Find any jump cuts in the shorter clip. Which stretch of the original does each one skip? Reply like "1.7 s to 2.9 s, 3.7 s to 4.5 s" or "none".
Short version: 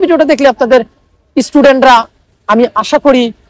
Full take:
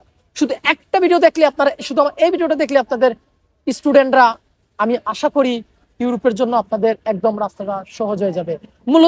none